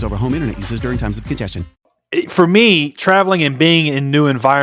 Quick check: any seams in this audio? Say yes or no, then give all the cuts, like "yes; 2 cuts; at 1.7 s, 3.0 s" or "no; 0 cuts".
yes; 1 cut; at 1.7 s